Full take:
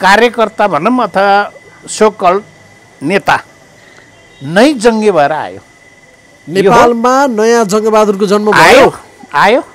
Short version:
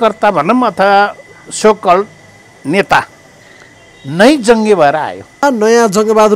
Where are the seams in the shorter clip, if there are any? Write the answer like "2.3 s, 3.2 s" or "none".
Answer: 5.4 s